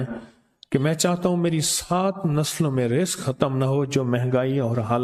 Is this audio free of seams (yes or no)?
yes